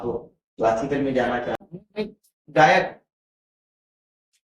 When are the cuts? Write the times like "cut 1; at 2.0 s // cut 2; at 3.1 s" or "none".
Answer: cut 1; at 1.6 s